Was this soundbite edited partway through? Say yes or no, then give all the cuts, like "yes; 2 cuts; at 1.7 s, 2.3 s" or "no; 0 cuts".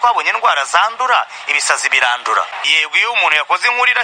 yes; 1 cut; at 2.5 s